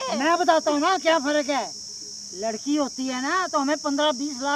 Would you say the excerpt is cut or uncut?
uncut